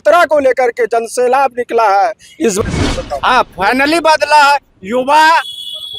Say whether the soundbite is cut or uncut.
cut